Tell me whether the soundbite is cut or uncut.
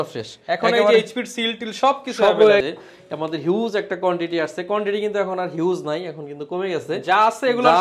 cut